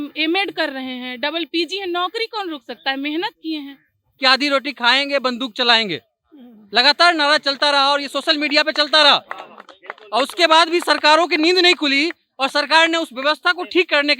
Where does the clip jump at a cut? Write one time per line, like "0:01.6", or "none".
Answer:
0:04.1